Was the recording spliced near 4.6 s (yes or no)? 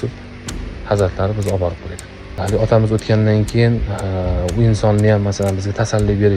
no